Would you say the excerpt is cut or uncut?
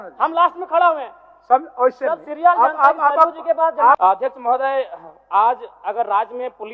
cut